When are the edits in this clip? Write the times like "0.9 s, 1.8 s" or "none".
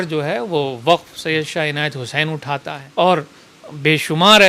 2.8 s